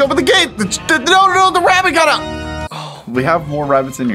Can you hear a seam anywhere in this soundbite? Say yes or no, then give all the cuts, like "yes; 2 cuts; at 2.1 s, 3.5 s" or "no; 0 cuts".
no; 0 cuts